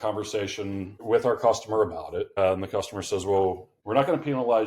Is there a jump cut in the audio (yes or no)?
yes